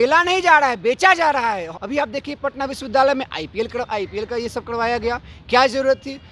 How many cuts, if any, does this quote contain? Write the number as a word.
one